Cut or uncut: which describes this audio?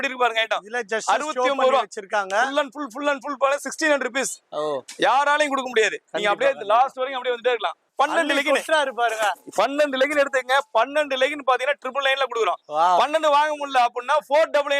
cut